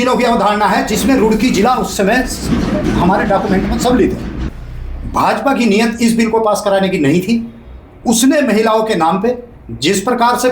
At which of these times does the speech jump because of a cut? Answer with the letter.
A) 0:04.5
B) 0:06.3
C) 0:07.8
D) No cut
A